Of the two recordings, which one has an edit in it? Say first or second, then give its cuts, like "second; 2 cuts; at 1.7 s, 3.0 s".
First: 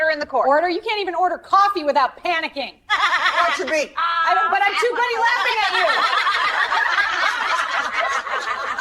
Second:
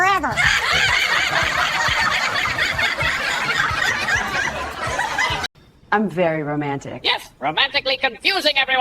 second; 1 cut; at 5.5 s